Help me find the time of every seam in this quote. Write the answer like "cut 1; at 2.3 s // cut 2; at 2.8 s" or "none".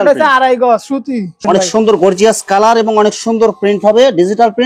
cut 1; at 1.4 s